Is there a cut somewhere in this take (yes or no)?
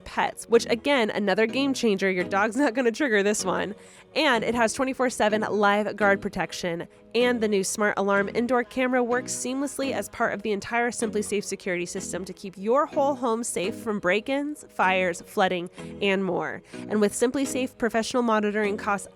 no